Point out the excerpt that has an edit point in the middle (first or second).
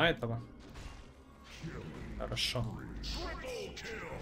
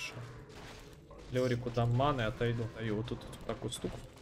second